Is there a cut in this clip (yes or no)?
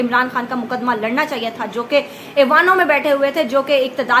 no